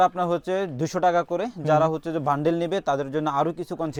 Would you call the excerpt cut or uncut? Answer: uncut